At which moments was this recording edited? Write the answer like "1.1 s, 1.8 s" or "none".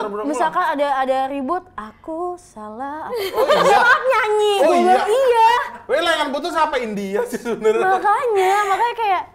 none

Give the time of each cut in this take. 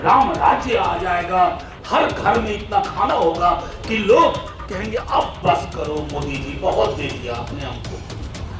none

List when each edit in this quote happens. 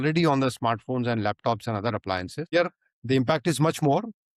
2.4 s

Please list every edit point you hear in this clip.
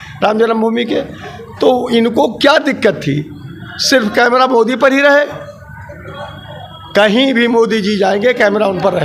none

